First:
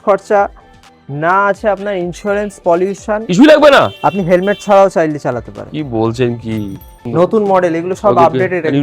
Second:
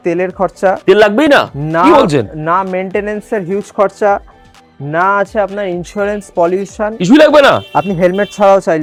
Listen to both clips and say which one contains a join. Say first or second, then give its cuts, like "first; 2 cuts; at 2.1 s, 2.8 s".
first; 1 cut; at 6.9 s